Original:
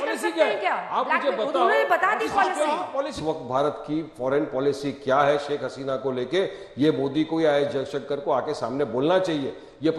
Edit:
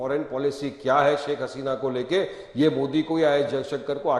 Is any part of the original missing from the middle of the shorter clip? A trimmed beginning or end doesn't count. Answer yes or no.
no